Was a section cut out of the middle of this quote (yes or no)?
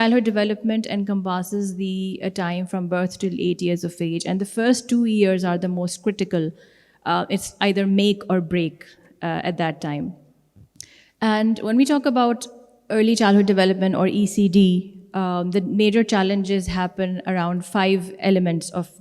no